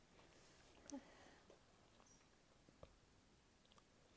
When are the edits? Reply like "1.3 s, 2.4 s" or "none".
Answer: none